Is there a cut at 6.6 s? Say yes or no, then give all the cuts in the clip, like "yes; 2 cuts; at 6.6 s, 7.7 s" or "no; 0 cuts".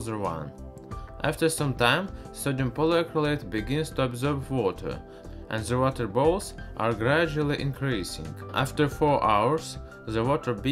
yes; 1 cut; at 6.6 s